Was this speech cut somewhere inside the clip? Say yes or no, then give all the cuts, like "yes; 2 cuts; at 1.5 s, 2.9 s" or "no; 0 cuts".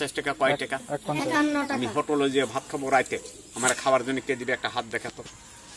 no; 0 cuts